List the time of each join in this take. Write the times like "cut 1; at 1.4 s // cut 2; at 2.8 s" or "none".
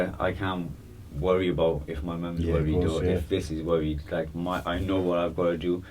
none